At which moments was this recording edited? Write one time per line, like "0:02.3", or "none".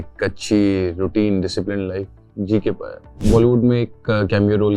0:03.2